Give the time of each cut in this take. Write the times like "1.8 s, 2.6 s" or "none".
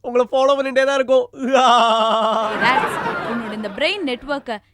2.5 s